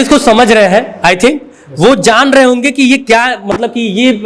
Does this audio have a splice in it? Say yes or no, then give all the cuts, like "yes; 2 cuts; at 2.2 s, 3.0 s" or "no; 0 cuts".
no; 0 cuts